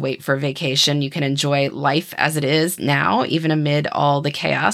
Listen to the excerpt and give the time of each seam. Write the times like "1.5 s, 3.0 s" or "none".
none